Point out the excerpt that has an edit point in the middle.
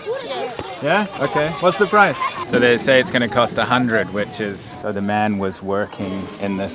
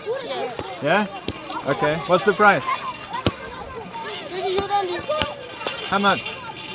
first; 3 cuts; at 1.1 s, 2.4 s, 4.7 s

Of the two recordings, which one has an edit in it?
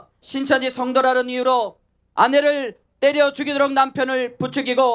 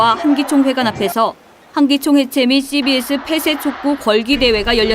first; 1 cut; at 2.0 s

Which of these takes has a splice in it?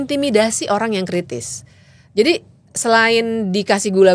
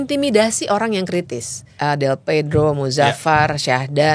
second; 1 cut; at 1.7 s

